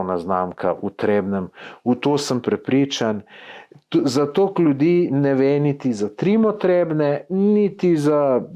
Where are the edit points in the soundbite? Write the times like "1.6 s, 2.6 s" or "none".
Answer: none